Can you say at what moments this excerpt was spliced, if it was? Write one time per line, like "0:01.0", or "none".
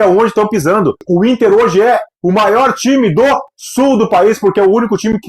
0:01.0

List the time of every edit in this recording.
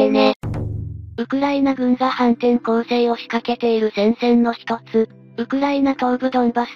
0:01.0

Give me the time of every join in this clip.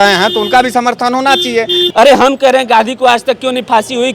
0:01.8

